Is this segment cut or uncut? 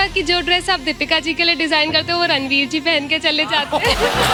uncut